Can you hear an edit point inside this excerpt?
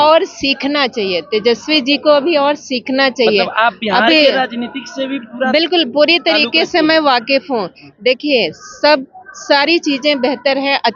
no; 0 cuts

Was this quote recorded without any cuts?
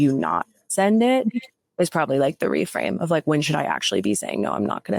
yes; 0 cuts

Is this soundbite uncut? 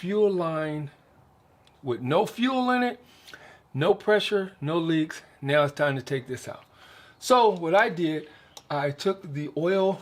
yes; 0 cuts

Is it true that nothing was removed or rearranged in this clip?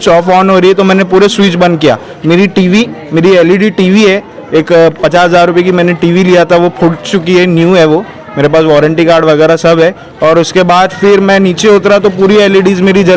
yes; 0 cuts

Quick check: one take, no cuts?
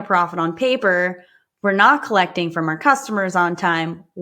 yes; 0 cuts

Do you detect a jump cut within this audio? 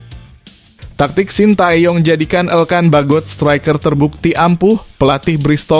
yes; 1 cut; at 0.9 s

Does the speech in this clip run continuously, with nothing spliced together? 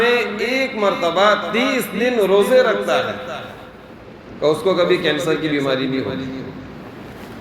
yes; 0 cuts

